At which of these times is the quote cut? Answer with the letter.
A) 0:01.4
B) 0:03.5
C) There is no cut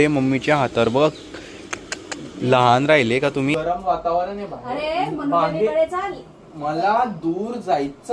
B